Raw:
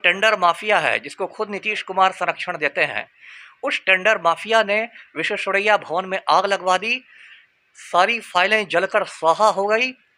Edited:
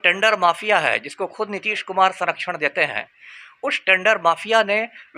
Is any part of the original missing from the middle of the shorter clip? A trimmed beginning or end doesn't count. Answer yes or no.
no